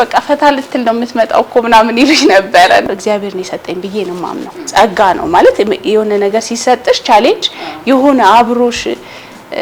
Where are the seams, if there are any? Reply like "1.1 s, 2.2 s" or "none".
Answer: 2.9 s